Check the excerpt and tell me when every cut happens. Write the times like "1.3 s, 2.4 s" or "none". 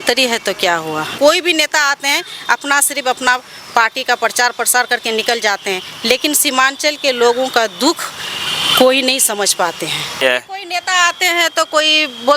1.1 s, 10.1 s